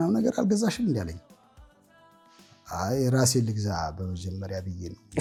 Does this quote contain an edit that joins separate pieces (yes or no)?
no